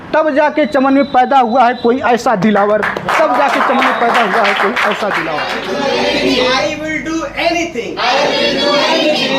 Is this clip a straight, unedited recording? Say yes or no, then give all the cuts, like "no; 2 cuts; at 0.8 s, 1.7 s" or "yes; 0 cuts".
no; 1 cut; at 5.5 s